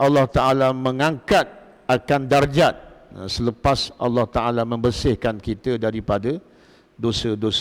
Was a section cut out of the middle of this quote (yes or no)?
no